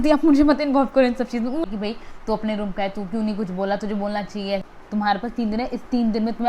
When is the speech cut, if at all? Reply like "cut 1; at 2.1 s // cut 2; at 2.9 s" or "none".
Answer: cut 1; at 1.6 s // cut 2; at 4.7 s

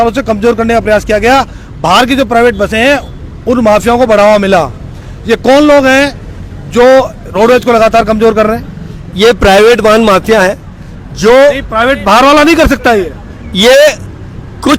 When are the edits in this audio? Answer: none

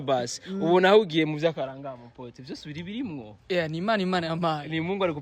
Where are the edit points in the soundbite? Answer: none

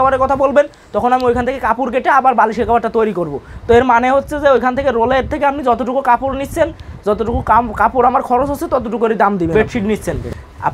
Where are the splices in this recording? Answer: cut 1; at 9.5 s

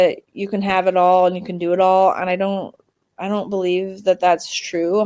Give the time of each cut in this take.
none

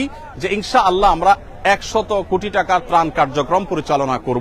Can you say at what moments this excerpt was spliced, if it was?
none

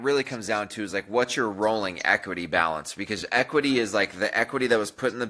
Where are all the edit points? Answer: none

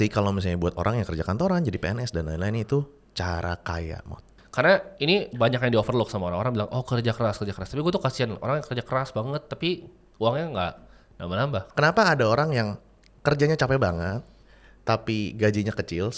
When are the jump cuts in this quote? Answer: cut 1; at 4.4 s // cut 2; at 11.7 s

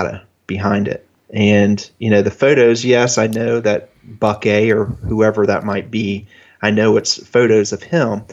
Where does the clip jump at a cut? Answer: none

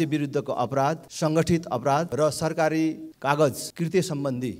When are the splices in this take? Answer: cut 1; at 1.1 s // cut 2; at 2.1 s // cut 3; at 3.1 s // cut 4; at 3.7 s

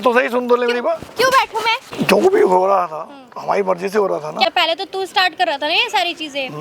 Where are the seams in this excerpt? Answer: cut 1; at 2.1 s // cut 2; at 4.5 s

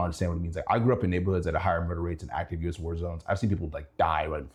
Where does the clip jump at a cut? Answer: none

